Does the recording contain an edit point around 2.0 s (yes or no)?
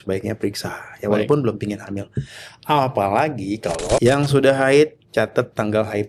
no